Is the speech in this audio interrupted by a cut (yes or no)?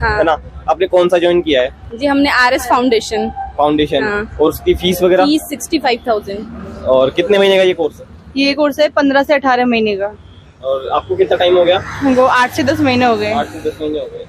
no